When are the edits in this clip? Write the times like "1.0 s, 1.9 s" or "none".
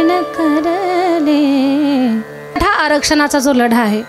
2.5 s